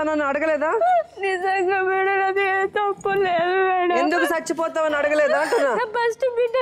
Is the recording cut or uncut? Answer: uncut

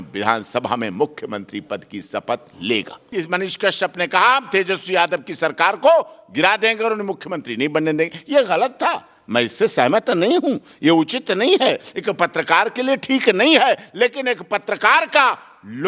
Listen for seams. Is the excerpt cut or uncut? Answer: cut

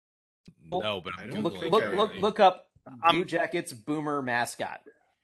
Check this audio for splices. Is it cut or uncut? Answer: uncut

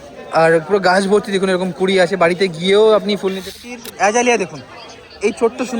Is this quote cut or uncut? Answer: cut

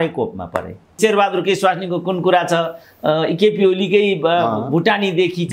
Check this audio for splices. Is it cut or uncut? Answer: cut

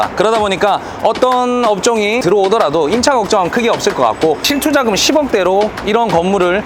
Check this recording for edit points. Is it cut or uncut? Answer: uncut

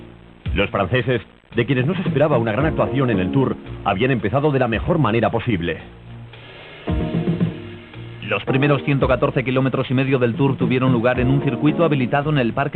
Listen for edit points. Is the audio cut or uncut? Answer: cut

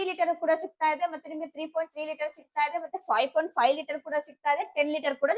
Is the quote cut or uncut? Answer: uncut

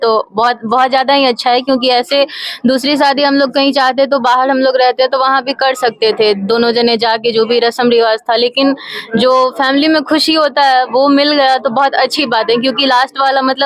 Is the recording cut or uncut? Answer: uncut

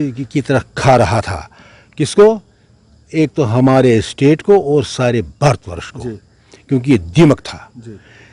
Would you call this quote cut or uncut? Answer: uncut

